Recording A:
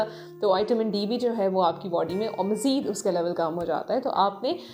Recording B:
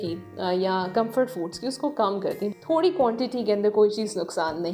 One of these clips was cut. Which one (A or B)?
B